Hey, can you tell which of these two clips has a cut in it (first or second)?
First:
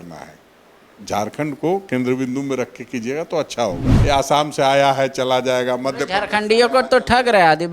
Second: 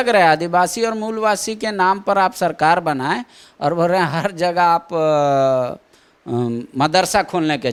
first